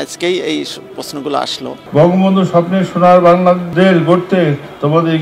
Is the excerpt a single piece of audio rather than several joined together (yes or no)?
no